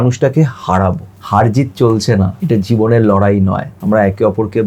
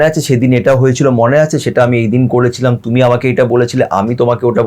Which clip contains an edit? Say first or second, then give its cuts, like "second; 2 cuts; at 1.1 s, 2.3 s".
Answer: first; 3 cuts; at 1.1 s, 2.4 s, 3.7 s